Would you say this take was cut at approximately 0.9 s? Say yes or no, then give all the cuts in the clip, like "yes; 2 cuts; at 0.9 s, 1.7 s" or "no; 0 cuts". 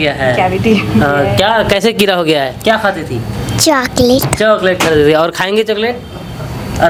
no; 0 cuts